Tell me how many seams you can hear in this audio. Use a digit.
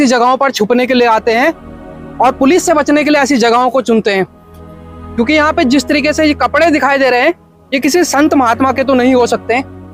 0